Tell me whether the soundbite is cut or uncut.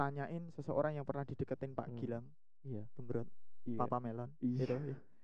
uncut